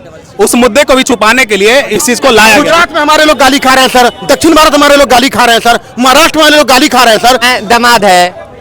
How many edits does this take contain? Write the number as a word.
two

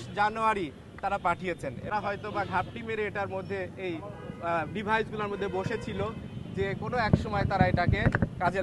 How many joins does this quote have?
one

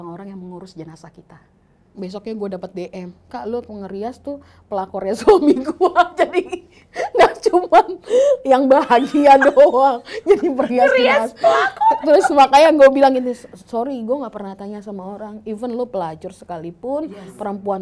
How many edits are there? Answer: one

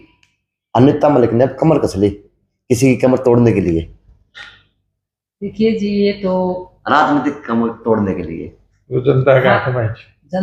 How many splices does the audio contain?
zero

